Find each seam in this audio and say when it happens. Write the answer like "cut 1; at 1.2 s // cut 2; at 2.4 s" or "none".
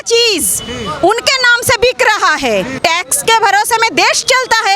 cut 1; at 2.8 s

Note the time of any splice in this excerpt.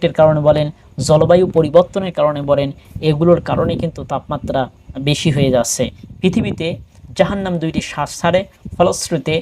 cut 1; at 5.8 s

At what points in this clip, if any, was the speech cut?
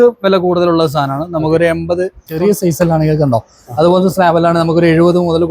cut 1; at 2.3 s

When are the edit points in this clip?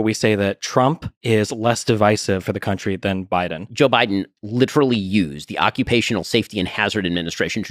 cut 1; at 3.7 s

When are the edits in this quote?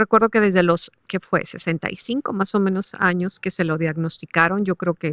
cut 1; at 1.0 s

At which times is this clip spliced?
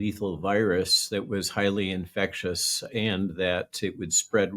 none

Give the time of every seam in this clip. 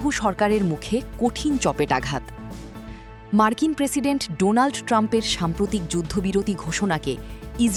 none

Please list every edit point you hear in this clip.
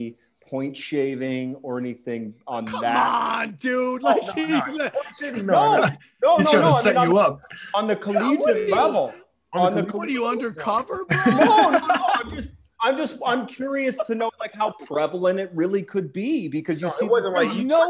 none

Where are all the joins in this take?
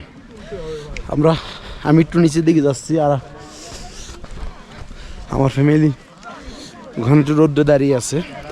none

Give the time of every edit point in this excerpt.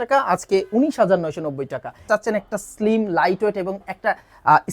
cut 1; at 2.1 s

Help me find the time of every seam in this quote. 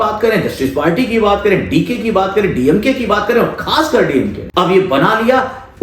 cut 1; at 4.4 s

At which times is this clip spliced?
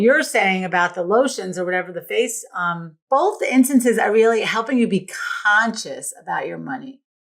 cut 1; at 2.9 s

